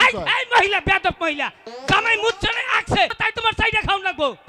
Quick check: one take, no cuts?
no; 1 cut; at 3.2 s

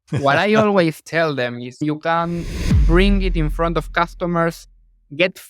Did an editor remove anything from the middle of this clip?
yes; 1 cut; at 1.7 s

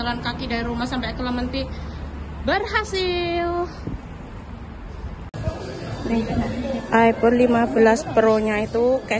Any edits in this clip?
yes; 1 cut; at 5.3 s

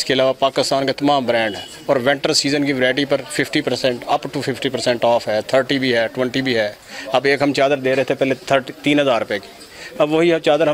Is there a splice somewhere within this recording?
no; 0 cuts

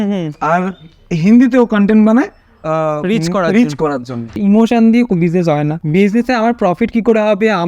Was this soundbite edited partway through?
yes; 2 cuts; at 4.4 s, 5.8 s

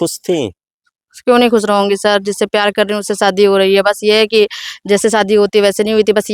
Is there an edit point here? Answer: no; 0 cuts

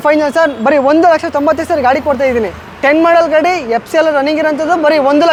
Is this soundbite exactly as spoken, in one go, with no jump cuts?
yes; 0 cuts

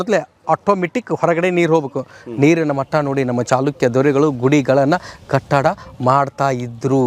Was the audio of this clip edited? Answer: no; 0 cuts

